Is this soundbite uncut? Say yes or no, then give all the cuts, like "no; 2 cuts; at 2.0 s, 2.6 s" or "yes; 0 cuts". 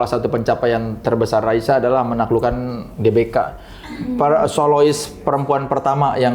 yes; 0 cuts